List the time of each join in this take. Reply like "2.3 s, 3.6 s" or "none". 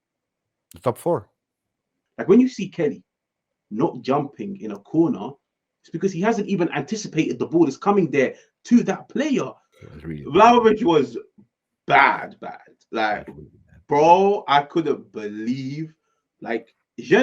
2.0 s, 9.6 s